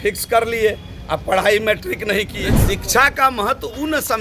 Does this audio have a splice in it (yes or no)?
yes